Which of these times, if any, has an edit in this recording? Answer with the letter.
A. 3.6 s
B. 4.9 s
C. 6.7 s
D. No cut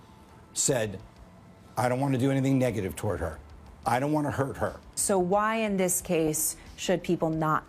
B